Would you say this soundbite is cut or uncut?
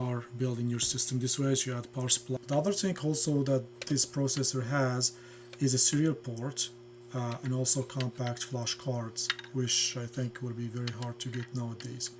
cut